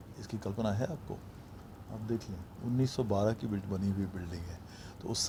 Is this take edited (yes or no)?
no